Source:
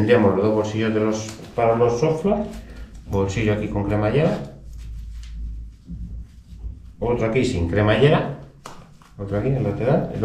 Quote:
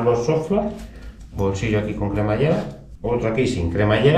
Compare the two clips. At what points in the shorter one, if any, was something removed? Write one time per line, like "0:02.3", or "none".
0:02.8